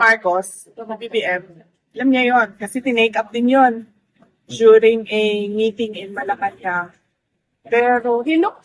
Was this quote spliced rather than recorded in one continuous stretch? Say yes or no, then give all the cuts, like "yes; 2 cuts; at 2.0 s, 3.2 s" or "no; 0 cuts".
no; 0 cuts